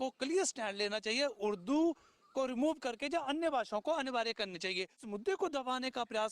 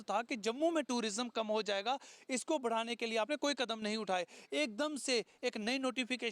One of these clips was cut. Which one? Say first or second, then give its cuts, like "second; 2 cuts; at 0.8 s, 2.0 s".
first; 1 cut; at 5.0 s